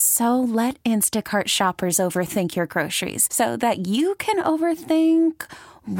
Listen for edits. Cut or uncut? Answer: uncut